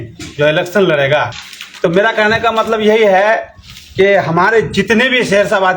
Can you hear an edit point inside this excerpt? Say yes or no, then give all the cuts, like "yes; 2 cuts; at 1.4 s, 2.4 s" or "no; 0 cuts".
no; 0 cuts